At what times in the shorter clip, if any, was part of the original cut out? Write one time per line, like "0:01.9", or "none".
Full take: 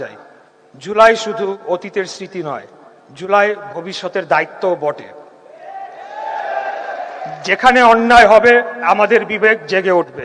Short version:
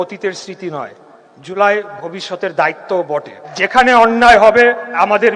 0:03.4